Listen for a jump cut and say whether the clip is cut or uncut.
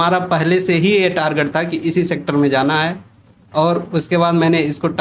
uncut